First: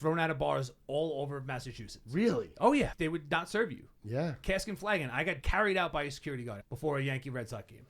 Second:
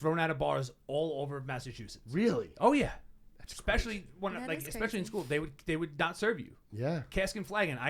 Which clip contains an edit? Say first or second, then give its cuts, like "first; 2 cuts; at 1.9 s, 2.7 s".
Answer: first; 3 cuts; at 2.9 s, 5.4 s, 6.7 s